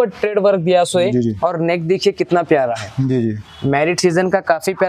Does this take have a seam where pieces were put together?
no; 0 cuts

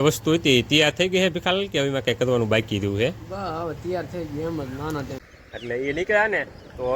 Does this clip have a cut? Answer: yes; 1 cut; at 5.2 s

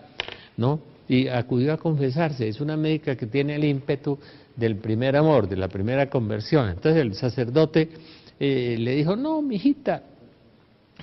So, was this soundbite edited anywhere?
no; 0 cuts

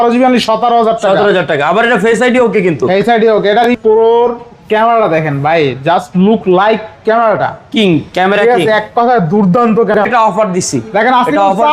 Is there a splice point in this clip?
yes; 2 cuts; at 3.7 s, 10.0 s

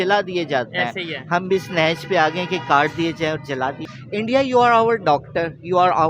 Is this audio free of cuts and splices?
no; 1 cut; at 3.9 s

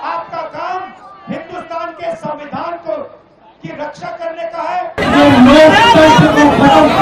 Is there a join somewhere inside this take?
yes; 1 cut; at 5.0 s

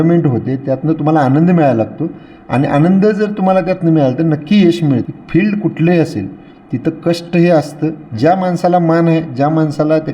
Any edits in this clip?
yes; 1 cut; at 5.0 s

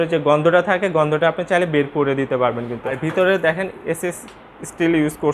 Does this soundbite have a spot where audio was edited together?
yes; 1 cut; at 3.0 s

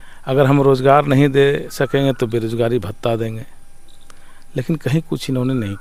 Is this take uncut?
yes; 0 cuts

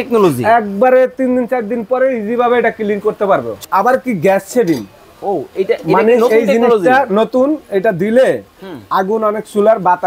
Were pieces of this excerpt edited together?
yes; 1 cut; at 3.6 s

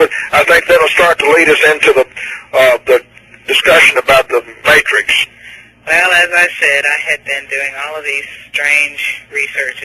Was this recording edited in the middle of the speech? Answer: yes; 1 cut; at 1.2 s

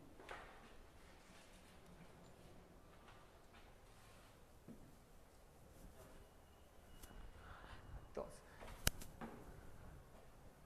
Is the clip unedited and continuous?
yes; 0 cuts

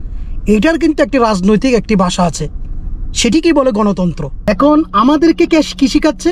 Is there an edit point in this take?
yes; 1 cut; at 4.4 s

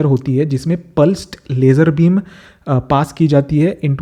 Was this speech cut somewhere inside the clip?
no; 0 cuts

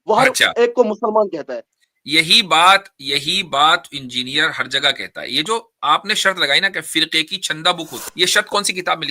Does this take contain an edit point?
yes; 1 cut; at 8.0 s

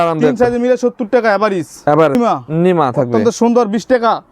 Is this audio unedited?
no; 1 cut; at 2.2 s

